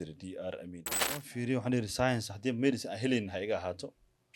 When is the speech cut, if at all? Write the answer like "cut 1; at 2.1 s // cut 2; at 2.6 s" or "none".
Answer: cut 1; at 1.3 s